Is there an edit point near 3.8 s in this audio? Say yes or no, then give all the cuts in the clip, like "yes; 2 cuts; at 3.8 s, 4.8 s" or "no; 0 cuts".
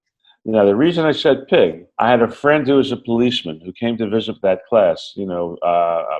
no; 1 cut; at 1.9 s